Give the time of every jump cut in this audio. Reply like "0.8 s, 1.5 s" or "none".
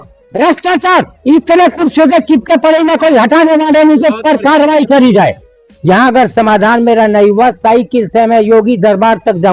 5.7 s